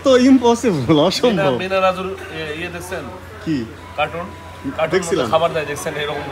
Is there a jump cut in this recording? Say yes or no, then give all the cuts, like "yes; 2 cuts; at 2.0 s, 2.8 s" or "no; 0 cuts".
no; 0 cuts